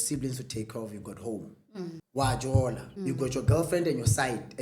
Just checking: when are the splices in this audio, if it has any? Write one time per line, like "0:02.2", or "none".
0:02.0
0:02.9